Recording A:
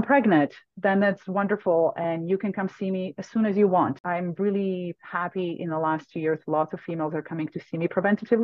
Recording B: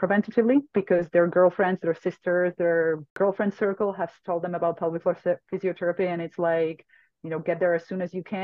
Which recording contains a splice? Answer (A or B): A